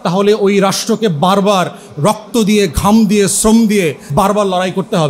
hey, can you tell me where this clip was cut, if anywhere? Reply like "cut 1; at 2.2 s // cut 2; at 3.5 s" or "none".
cut 1; at 4.1 s